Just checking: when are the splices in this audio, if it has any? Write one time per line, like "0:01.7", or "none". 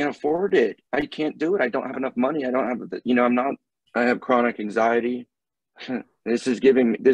0:03.7